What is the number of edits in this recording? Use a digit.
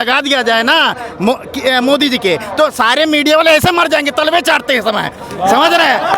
0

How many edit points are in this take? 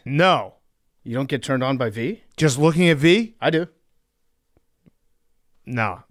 0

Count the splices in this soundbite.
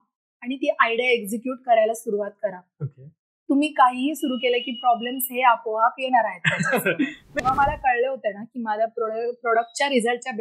1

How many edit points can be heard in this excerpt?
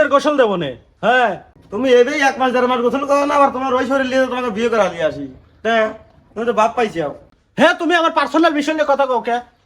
2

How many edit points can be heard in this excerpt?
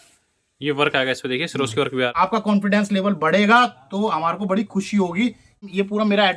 2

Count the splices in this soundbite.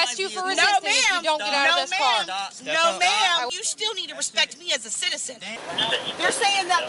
2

